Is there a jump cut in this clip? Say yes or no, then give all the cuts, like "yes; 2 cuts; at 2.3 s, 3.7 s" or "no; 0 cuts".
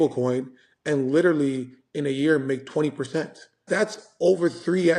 yes; 1 cut; at 3.6 s